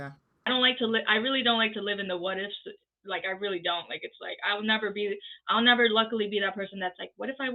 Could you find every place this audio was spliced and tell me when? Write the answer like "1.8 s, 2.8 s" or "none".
none

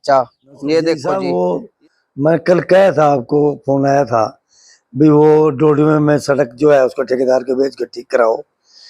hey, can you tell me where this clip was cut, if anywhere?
1.0 s

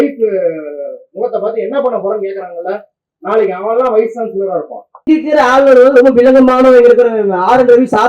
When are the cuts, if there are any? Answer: 5.1 s

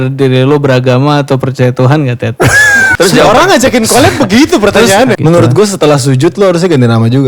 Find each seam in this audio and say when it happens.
2.9 s, 5.2 s

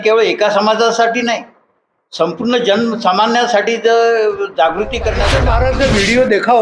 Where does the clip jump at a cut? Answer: 5.3 s

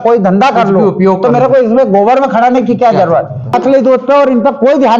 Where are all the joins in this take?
3.5 s

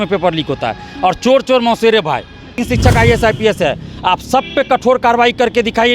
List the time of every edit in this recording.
2.6 s

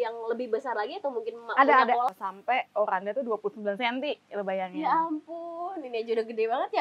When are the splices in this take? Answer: 2.1 s

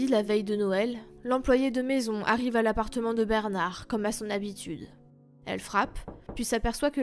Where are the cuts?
none

